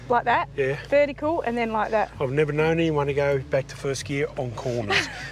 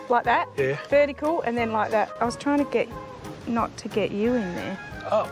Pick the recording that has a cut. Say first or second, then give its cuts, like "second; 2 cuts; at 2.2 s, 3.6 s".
second; 1 cut; at 2.1 s